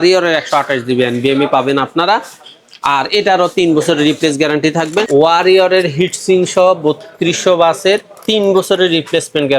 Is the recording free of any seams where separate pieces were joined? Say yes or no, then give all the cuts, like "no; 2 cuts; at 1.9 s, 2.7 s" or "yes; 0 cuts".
no; 1 cut; at 5.1 s